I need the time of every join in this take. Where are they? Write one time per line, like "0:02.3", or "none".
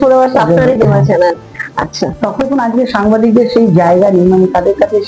0:02.4